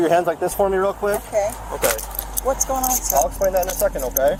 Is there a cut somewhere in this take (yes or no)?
no